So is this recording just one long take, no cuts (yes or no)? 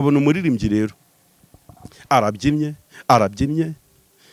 yes